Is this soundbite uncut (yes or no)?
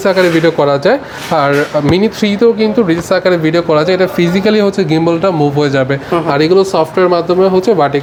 yes